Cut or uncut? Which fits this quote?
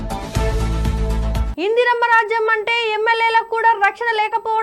cut